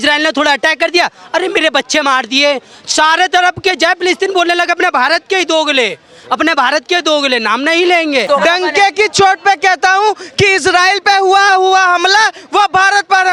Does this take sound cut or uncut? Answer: cut